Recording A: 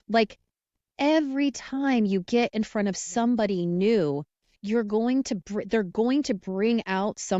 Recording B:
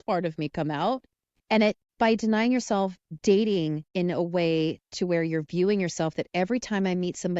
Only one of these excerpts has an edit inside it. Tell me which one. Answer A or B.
B